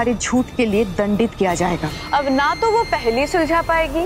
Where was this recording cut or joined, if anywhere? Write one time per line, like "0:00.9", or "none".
0:01.9